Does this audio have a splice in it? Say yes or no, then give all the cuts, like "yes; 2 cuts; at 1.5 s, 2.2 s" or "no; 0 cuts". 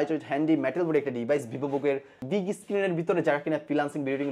yes; 1 cut; at 2.2 s